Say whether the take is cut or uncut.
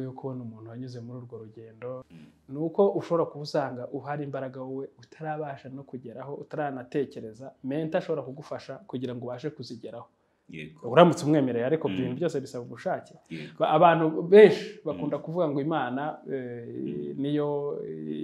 cut